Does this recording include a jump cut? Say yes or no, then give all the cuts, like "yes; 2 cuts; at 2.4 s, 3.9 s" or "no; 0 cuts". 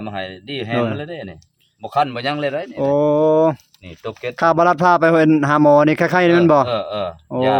no; 0 cuts